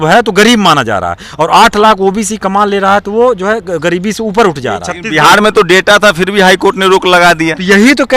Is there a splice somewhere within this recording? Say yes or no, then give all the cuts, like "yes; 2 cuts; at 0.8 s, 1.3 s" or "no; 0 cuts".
yes; 1 cut; at 5.0 s